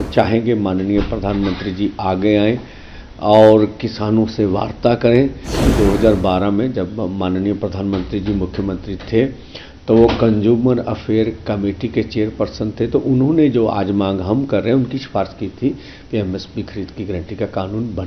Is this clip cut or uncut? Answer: cut